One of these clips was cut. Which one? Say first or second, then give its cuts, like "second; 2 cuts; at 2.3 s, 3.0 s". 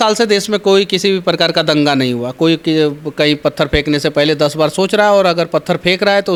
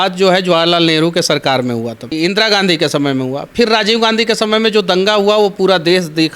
second; 1 cut; at 2.1 s